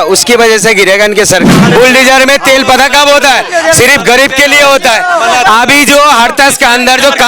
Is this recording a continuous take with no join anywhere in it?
no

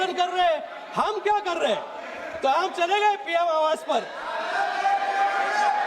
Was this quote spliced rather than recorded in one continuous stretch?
no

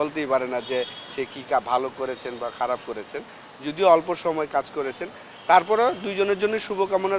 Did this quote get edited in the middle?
no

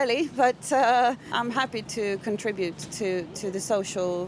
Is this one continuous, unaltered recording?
no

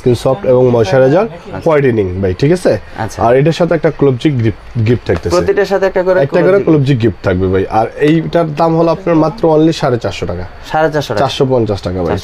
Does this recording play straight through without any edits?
yes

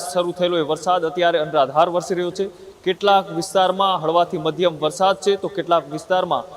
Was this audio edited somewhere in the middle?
no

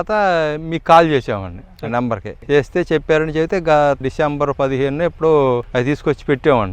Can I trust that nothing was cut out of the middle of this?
no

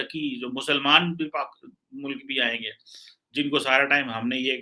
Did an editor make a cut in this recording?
no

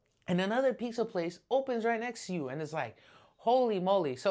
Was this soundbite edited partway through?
no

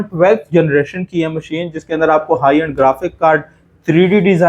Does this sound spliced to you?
no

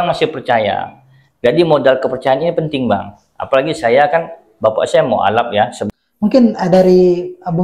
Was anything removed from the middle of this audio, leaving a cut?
yes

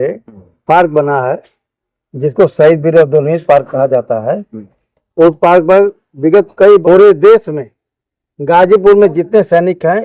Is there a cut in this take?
yes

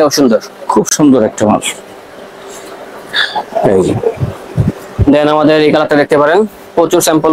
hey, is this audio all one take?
yes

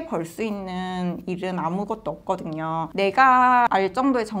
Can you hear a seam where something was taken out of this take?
no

